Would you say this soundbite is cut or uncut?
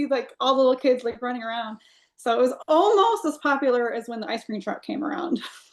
uncut